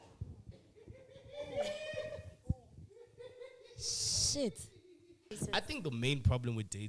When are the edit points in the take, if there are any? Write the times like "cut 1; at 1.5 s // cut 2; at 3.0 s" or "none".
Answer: cut 1; at 5.4 s